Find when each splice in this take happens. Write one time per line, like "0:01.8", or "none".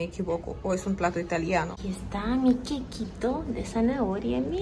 0:01.7